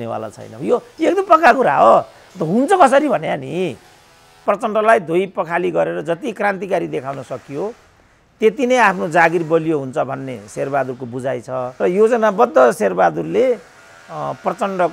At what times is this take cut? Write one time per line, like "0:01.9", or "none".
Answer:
0:04.4
0:11.7